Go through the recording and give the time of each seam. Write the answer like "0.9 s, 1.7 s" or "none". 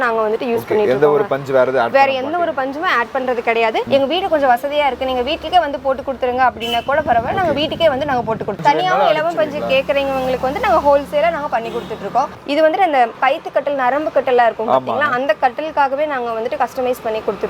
3.9 s, 8.6 s, 12.4 s